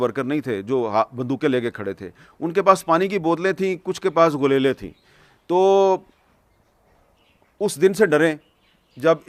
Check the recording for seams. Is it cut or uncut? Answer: uncut